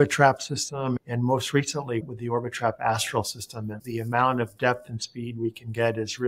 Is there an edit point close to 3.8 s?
yes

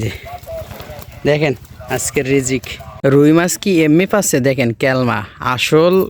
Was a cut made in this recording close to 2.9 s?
yes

